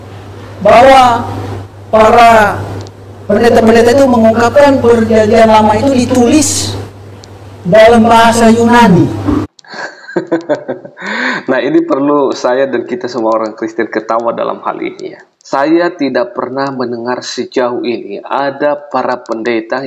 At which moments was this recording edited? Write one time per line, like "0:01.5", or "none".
none